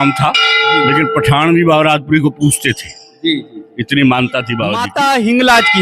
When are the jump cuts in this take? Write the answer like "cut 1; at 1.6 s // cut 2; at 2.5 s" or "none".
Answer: cut 1; at 4.8 s